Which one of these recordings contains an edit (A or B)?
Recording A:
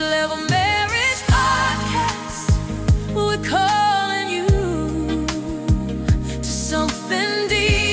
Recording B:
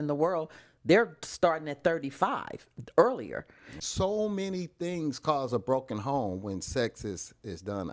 B